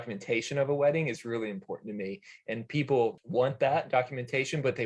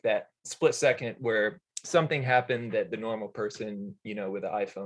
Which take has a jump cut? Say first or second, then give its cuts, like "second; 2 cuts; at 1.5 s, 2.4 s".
first; 1 cut; at 3.2 s